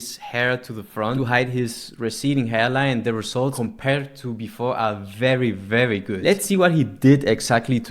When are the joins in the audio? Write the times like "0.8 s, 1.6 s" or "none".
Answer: 1.2 s, 3.5 s, 6.1 s